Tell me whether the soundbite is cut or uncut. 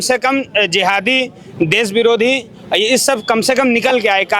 uncut